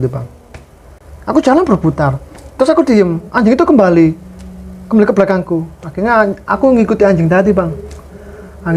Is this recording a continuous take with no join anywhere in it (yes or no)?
yes